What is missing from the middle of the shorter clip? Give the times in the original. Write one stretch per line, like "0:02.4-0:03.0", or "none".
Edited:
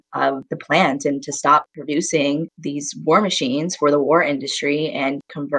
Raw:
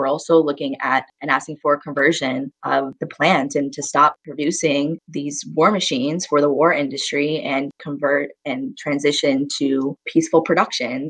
none